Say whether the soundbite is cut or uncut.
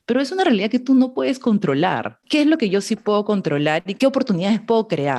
cut